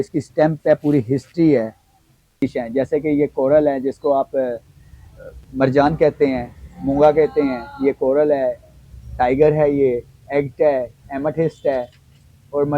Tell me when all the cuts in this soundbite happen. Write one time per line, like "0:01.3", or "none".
0:02.4